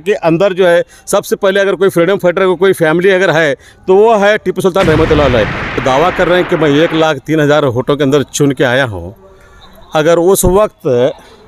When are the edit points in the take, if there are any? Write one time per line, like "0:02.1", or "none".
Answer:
0:05.8